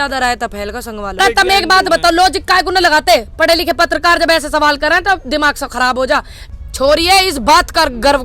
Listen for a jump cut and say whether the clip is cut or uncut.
cut